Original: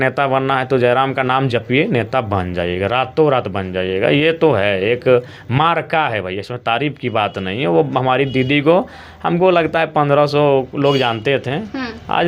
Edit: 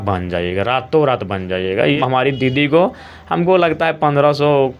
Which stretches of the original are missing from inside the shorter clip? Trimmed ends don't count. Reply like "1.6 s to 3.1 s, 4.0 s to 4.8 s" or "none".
4.2 s to 7.9 s

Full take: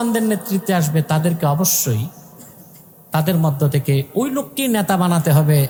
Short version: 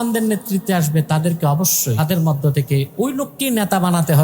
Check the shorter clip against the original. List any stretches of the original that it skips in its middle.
2.0 s to 3.1 s

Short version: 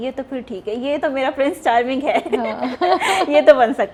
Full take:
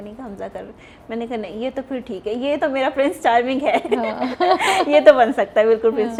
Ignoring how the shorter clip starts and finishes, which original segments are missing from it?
none

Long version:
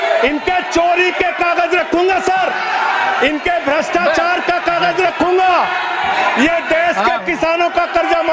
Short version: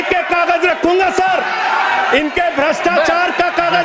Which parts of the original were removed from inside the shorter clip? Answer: none

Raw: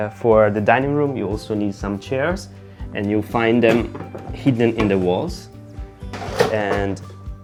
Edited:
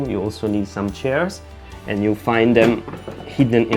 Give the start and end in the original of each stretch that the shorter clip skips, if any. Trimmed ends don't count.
none

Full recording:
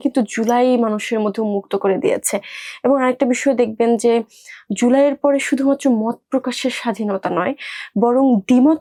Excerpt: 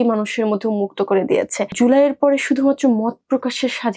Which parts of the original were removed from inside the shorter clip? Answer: 2.4 s to 4.6 s

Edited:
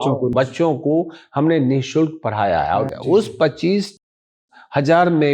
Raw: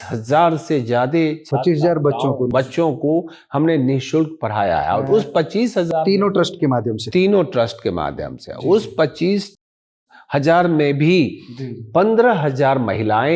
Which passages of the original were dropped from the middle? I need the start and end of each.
5.0 s to 8.4 s

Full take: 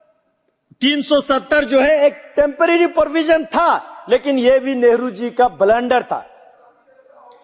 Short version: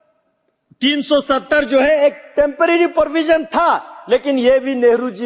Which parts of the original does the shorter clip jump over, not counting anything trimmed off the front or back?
none

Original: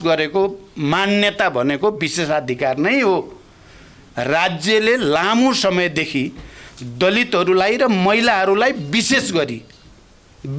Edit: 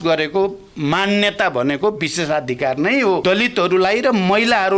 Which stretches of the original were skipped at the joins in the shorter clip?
3.2 s to 7.0 s

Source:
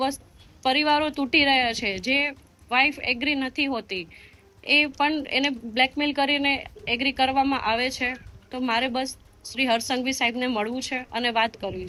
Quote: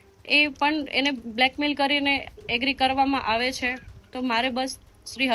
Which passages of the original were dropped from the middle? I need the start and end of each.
none

